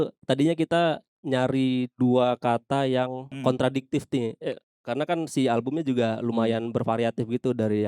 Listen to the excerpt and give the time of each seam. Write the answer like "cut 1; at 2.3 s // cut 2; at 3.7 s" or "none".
cut 1; at 1.1 s // cut 2; at 3.3 s